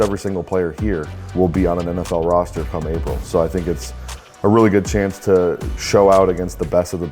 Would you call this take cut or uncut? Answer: cut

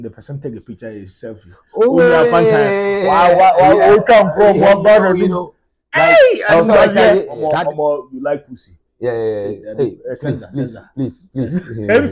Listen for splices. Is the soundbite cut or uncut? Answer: cut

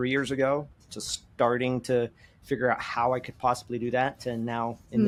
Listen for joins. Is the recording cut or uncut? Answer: uncut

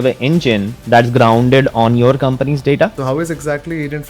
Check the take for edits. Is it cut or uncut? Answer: cut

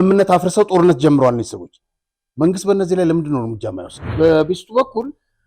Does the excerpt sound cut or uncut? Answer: cut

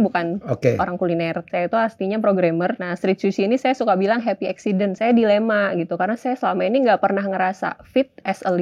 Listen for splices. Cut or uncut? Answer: cut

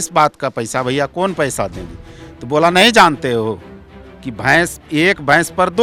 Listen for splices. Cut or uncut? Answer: uncut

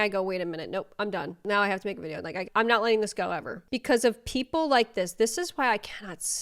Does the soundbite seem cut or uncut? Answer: cut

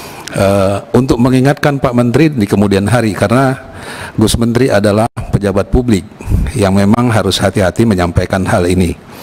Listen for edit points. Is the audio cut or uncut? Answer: uncut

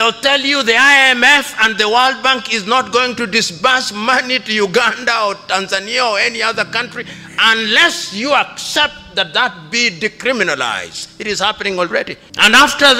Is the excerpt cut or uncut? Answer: uncut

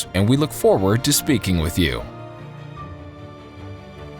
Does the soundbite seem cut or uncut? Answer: cut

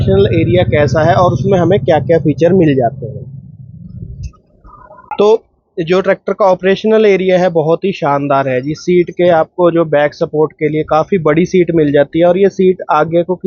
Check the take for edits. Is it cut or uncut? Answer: uncut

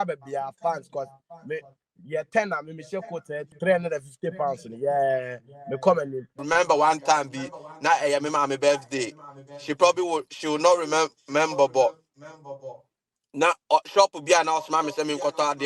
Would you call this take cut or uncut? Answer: cut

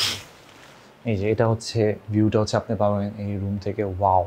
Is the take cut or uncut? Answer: uncut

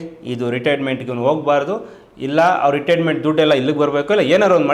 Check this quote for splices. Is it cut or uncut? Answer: uncut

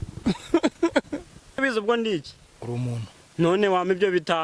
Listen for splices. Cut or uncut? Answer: cut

